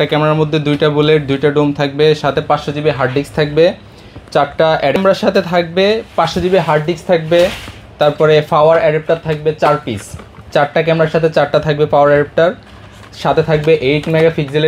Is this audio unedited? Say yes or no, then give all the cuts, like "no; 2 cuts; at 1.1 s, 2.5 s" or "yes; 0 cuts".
yes; 0 cuts